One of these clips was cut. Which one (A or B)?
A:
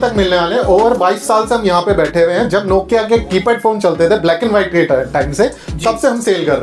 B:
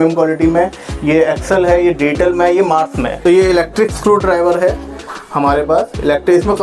B